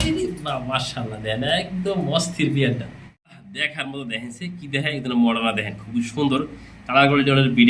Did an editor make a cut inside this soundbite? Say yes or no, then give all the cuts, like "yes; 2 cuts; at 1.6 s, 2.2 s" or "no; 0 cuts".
no; 0 cuts